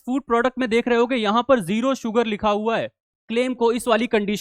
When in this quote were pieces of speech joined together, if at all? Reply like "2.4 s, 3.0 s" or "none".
3.0 s

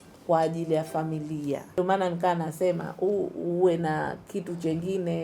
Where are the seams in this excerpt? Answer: 1.7 s

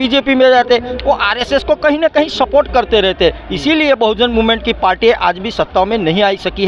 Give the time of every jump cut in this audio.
none

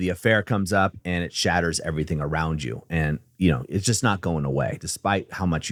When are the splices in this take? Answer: none

